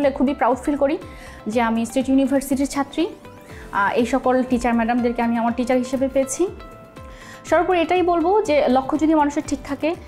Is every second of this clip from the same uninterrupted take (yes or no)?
yes